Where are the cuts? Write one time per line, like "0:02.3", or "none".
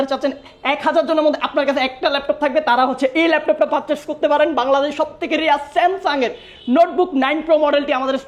none